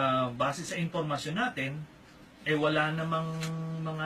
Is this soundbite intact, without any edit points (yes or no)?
yes